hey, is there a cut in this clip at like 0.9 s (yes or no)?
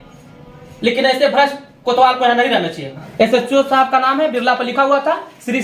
no